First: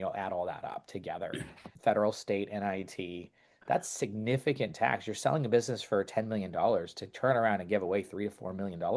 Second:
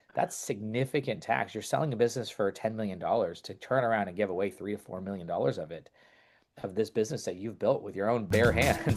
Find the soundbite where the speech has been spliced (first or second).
first